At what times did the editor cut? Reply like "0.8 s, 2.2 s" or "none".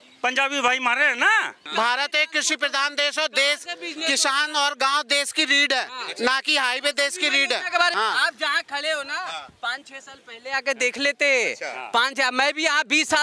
1.6 s, 7.9 s